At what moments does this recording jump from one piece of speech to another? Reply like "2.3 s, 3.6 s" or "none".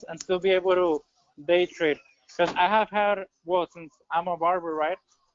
none